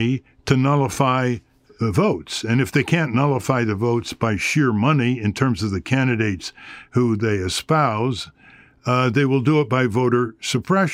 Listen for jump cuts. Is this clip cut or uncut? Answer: uncut